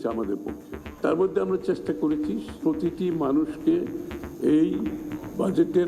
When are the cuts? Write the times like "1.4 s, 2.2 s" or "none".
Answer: 2.6 s